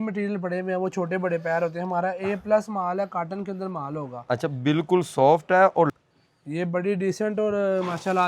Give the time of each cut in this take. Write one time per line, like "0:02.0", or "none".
0:05.9